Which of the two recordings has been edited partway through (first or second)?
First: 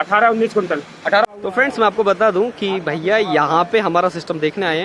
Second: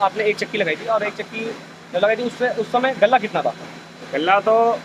first